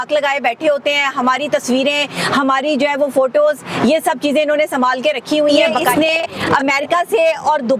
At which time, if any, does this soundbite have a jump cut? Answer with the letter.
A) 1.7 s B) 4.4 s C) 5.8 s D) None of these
C